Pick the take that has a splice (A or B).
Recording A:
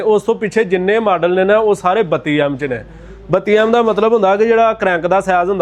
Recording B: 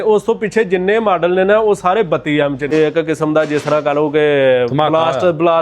B